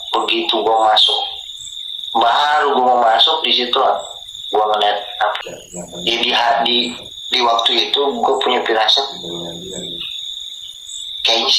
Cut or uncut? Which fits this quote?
cut